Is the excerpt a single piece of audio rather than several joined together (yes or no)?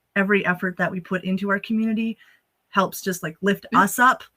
yes